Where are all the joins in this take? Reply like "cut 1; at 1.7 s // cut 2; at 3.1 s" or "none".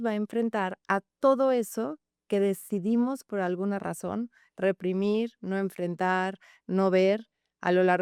none